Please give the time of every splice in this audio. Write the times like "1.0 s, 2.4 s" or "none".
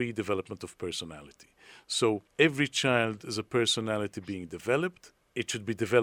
2.3 s

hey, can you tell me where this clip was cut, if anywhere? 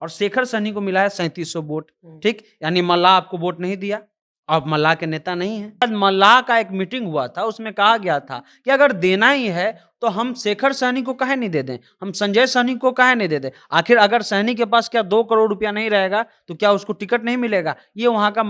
5.8 s

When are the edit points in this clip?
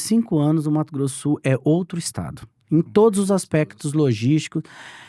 none

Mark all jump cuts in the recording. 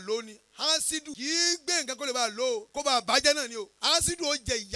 1.1 s, 2.7 s, 3.7 s

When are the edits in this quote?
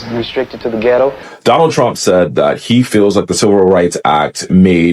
1.3 s

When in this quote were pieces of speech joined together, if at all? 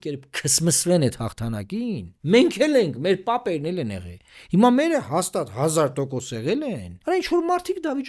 2.1 s, 6.9 s

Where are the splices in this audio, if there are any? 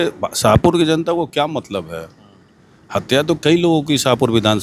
none

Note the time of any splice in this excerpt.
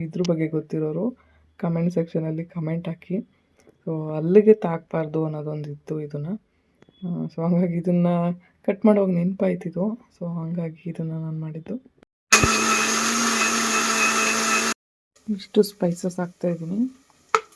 none

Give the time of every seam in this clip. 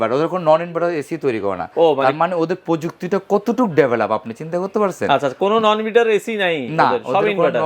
none

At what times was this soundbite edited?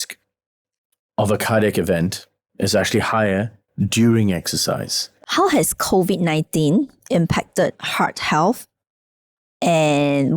5.1 s

